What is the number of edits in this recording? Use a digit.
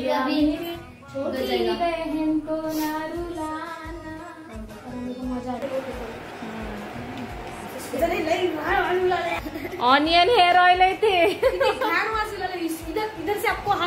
1